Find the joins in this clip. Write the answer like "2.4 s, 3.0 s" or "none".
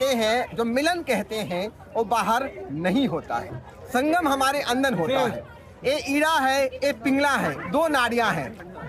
none